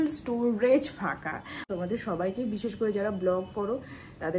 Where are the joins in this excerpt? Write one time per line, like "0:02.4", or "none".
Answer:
0:01.7